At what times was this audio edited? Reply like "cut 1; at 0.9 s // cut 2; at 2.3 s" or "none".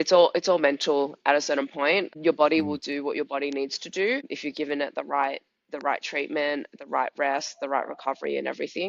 cut 1; at 2.1 s // cut 2; at 4.3 s